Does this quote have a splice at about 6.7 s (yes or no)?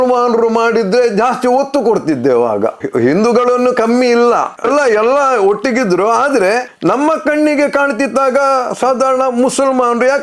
yes